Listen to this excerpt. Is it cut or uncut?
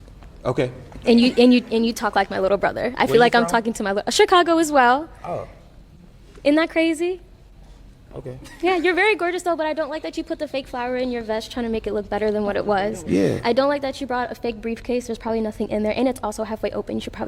cut